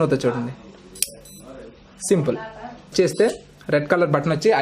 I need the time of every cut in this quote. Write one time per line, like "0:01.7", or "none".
0:02.9